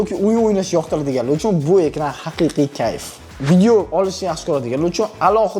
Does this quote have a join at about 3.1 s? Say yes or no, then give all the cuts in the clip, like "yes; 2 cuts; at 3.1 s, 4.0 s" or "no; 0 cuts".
yes; 1 cut; at 3.1 s